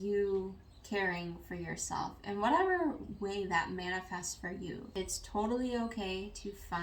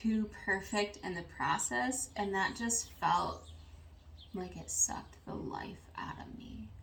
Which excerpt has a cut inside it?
first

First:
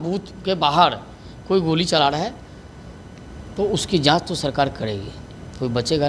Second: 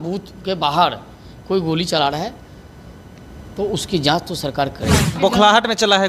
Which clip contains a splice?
second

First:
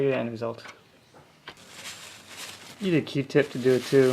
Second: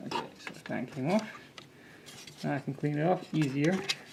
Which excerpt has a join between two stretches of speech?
first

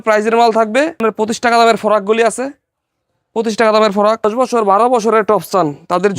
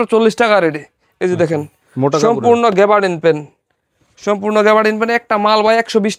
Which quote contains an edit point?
first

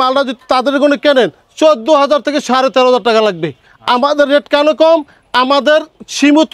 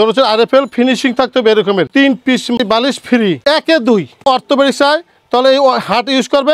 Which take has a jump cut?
second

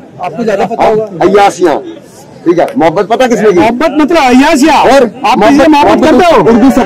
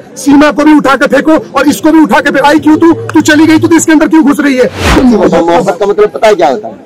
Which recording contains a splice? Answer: second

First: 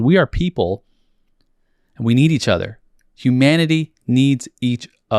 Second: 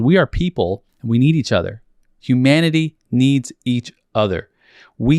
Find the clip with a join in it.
second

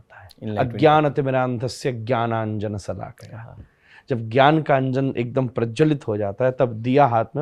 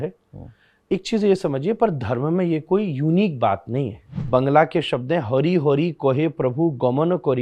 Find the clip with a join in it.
second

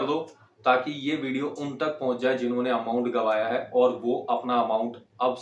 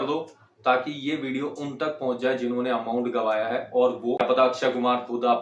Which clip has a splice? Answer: second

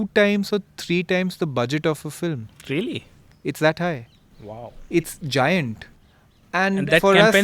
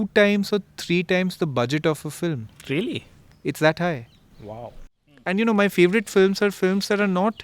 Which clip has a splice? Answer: second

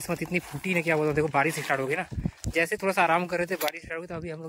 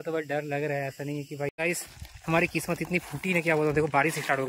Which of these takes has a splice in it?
second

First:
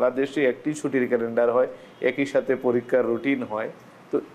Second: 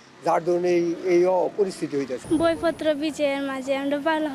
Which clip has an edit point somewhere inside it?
second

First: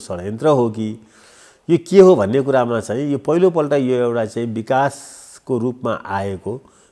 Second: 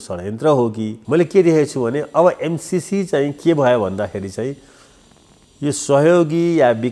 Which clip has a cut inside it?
second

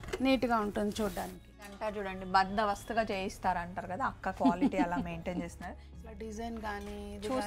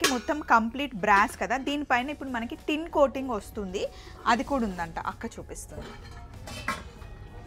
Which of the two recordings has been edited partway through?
first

